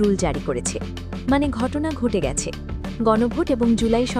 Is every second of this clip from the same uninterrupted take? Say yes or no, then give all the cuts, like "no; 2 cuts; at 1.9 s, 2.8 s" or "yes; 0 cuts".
yes; 0 cuts